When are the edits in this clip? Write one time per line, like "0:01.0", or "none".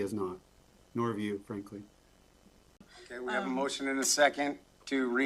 0:02.9